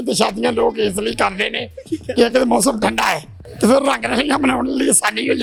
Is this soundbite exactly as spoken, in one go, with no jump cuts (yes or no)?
yes